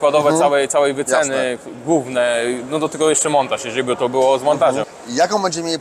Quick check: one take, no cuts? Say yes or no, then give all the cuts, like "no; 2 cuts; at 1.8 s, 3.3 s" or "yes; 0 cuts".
no; 1 cut; at 4.9 s